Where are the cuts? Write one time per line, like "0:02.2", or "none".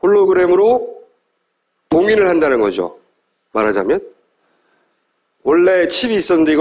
0:03.4

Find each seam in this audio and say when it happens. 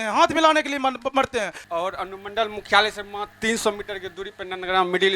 0:01.6

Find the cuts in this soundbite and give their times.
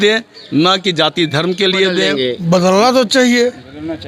0:02.1

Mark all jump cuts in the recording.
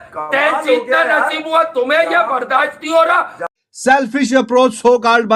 0:03.4

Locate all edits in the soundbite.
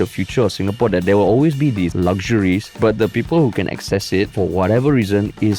0:01.9
0:02.7
0:04.3

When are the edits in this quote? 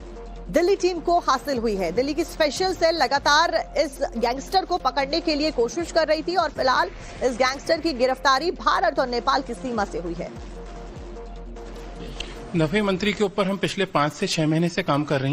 0:10.1

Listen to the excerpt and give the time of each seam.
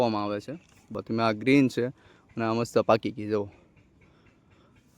0:00.9

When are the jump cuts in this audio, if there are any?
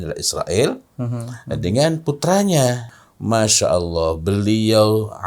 0:03.0

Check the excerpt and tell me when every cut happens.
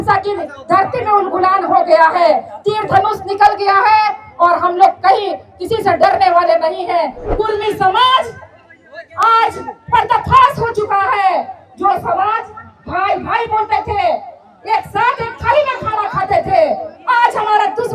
0:07.2

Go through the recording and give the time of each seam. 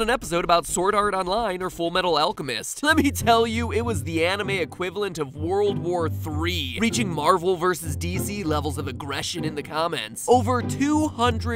0:08.9

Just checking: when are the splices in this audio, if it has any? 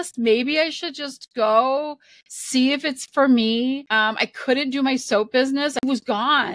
0:03.9
0:05.8

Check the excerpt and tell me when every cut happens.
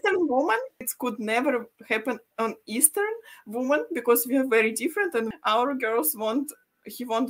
0:05.3

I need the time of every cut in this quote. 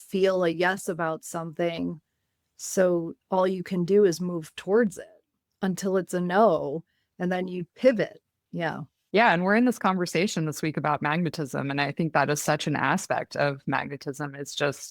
none

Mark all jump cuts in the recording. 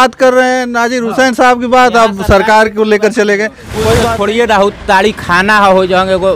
0:04.0

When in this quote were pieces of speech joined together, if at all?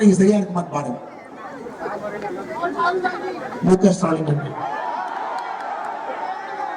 none

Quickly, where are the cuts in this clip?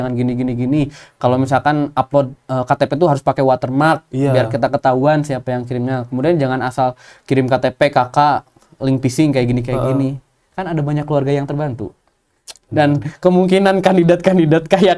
none

